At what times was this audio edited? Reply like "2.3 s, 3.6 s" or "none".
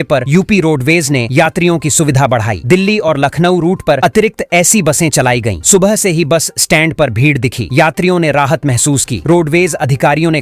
none